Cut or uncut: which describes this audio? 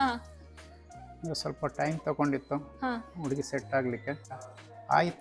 cut